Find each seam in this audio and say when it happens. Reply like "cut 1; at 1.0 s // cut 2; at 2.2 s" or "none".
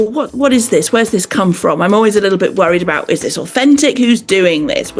none